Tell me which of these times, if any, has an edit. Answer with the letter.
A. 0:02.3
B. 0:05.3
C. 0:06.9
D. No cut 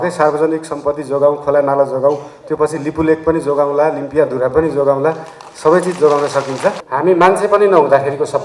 C